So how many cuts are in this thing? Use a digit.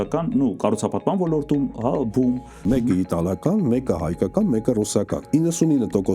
2